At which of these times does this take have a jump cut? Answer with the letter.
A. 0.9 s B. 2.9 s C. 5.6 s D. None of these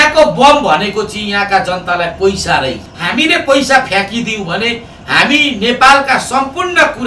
B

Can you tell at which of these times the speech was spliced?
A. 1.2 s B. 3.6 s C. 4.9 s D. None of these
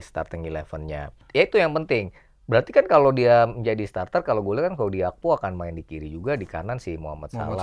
A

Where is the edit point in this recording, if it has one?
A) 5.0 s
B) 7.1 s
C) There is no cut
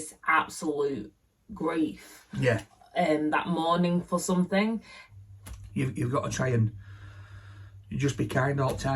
A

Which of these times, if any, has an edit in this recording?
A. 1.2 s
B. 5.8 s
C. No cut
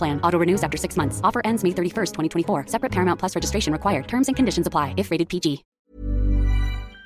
B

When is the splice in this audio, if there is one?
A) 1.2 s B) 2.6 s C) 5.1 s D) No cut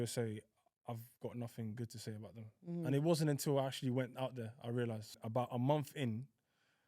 C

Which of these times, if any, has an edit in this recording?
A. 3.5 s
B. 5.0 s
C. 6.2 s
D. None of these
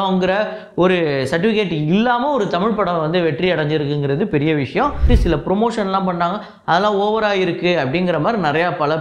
B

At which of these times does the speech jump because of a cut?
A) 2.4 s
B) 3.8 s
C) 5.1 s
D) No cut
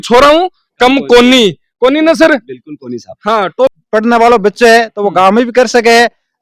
B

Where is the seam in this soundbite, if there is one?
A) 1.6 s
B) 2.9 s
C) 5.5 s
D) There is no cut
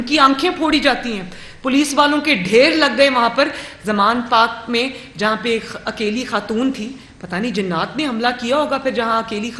D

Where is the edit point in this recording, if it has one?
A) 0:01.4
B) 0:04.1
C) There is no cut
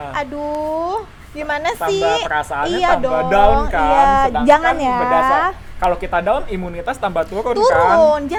C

